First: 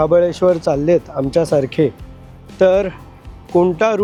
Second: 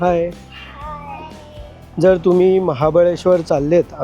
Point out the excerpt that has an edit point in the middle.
second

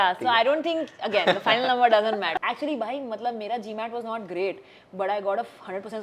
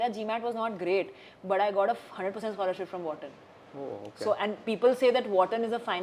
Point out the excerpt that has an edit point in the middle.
first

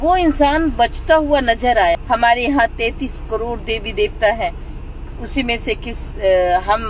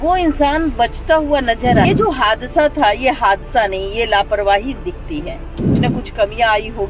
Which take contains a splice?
second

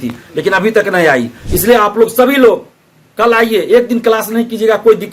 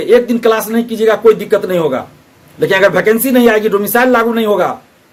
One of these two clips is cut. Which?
first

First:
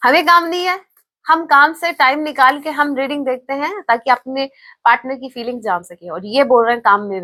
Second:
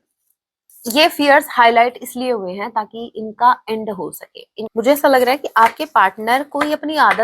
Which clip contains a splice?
second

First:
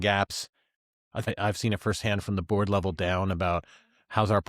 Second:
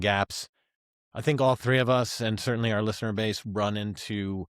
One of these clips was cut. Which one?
first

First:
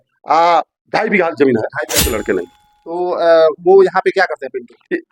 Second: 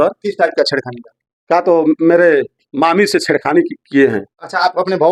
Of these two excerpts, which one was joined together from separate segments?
first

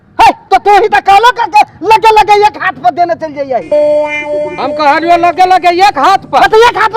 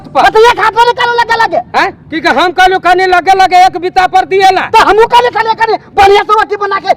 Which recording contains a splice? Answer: first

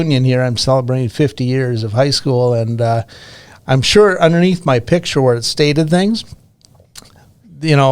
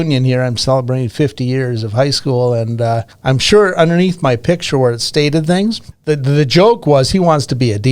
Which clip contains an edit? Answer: second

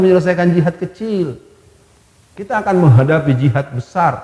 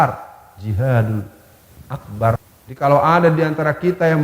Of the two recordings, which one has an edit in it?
second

